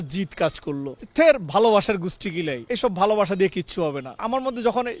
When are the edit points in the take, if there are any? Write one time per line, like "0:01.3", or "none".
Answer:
none